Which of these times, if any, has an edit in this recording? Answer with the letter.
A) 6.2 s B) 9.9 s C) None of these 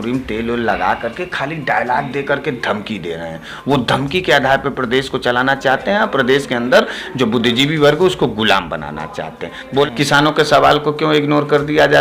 B